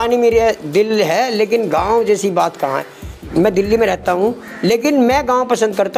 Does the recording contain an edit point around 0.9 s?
no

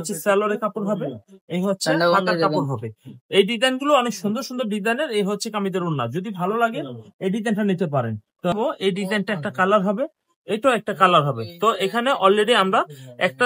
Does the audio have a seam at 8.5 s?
yes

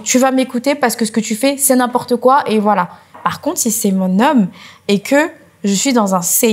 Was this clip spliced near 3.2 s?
yes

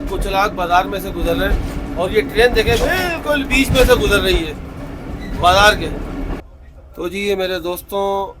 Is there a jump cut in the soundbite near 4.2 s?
no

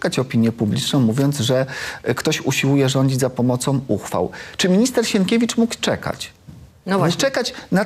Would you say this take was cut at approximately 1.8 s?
no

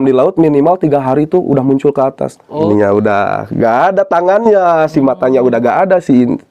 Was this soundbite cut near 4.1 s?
no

